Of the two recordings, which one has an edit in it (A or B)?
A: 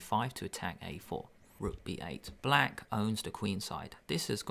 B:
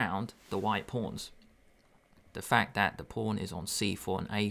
A